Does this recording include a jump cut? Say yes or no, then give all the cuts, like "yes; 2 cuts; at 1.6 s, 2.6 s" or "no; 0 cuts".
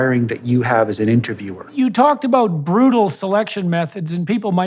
yes; 1 cut; at 1.7 s